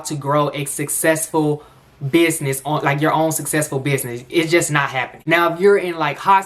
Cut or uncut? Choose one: cut